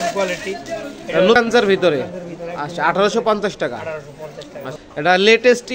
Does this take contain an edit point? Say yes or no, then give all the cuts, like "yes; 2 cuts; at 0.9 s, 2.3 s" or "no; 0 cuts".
yes; 2 cuts; at 1.4 s, 4.7 s